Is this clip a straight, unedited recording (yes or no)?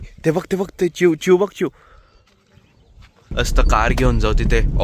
no